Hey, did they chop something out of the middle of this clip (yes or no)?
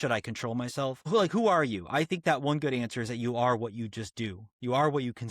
yes